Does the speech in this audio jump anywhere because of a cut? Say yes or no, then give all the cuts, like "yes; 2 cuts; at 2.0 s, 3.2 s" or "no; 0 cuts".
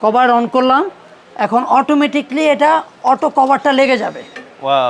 no; 0 cuts